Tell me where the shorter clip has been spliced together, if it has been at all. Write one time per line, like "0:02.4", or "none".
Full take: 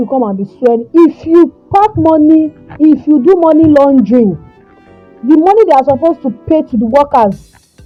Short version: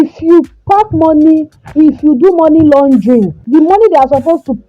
0:03.4